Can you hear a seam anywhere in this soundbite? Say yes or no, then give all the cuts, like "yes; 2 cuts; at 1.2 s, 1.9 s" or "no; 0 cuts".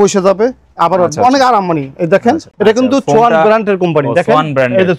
no; 0 cuts